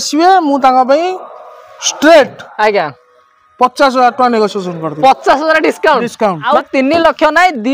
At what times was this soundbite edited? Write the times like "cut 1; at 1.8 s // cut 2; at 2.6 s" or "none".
cut 1; at 6.4 s